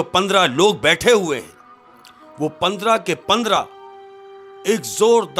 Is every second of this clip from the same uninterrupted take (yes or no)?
yes